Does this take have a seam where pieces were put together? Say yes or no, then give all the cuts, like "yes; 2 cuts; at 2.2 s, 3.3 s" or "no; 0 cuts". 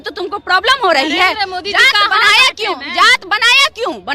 no; 0 cuts